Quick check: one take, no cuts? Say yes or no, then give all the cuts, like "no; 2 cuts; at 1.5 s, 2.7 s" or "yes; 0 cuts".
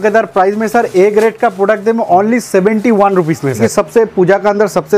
no; 1 cut; at 3.6 s